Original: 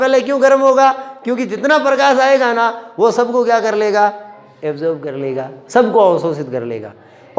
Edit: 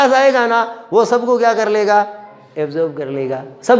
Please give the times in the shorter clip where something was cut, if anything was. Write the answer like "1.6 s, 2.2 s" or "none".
none

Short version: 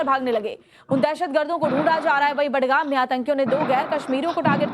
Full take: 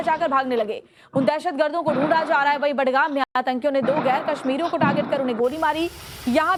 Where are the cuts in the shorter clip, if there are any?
3.0 s

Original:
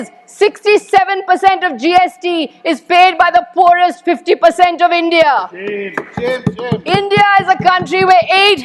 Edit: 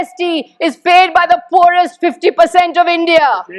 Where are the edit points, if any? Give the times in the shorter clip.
none

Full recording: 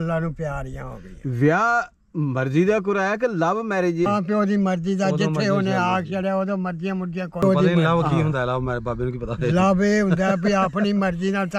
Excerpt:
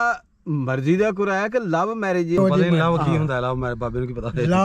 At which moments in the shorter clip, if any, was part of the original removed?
2.4 s

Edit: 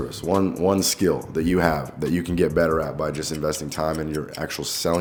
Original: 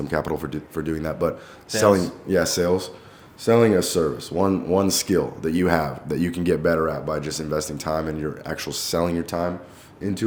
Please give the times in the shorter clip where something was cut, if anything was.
none

